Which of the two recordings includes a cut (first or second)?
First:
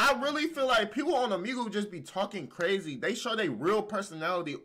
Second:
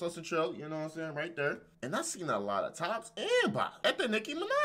second